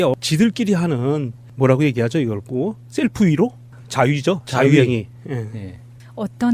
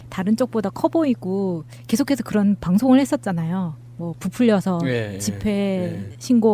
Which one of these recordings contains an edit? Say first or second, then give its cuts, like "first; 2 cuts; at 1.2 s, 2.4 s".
second; 1 cut; at 3.5 s